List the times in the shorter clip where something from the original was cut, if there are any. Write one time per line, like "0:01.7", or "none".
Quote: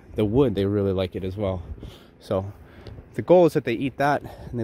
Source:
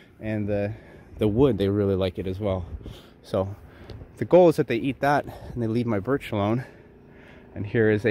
none